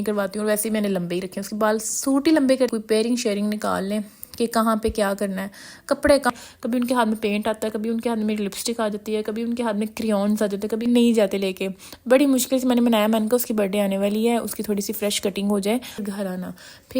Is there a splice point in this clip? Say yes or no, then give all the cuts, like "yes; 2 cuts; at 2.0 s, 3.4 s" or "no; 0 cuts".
yes; 4 cuts; at 2.7 s, 6.3 s, 10.8 s, 16.0 s